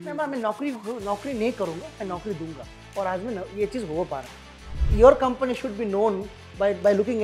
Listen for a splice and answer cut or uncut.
cut